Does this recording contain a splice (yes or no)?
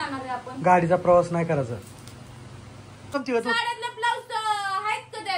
yes